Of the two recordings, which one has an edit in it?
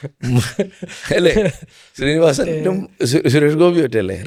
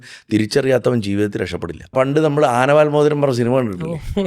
second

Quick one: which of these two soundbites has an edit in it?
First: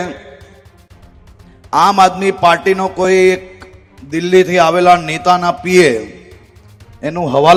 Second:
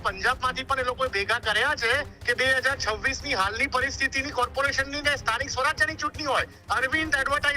second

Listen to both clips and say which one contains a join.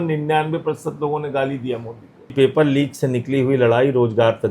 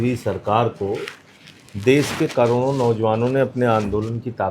first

